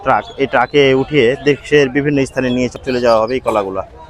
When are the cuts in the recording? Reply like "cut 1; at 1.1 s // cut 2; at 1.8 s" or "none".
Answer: cut 1; at 2.7 s